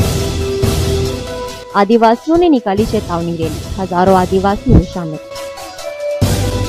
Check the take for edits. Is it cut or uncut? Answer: uncut